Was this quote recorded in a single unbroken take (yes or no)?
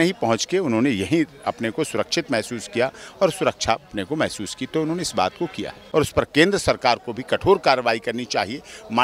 no